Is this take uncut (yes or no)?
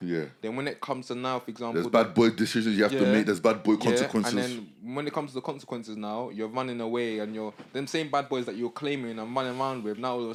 yes